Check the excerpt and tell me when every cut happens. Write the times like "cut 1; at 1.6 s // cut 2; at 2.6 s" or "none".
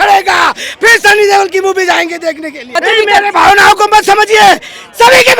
cut 1; at 2.7 s